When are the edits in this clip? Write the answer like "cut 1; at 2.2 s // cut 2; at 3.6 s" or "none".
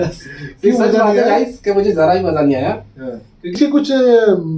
cut 1; at 3.5 s